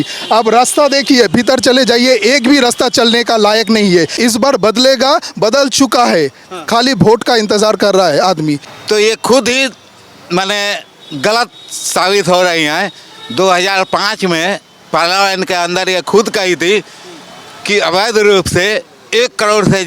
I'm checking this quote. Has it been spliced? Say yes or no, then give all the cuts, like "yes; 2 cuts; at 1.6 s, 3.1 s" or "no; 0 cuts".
yes; 2 cuts; at 4.1 s, 8.7 s